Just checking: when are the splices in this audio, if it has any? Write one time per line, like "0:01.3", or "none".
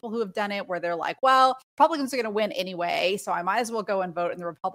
0:01.6